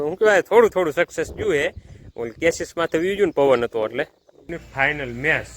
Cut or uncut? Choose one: cut